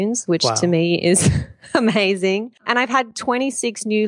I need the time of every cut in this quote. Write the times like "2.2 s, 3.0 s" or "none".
2.6 s